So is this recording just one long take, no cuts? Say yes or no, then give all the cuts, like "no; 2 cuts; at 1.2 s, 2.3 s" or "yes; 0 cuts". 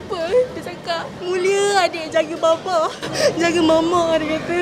no; 1 cut; at 3.1 s